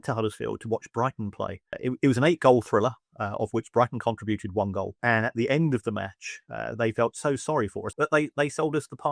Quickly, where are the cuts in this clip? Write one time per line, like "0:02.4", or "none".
0:01.8
0:04.9
0:07.8